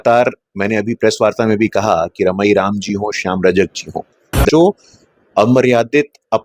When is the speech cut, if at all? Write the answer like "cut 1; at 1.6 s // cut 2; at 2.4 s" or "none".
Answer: cut 1; at 4.5 s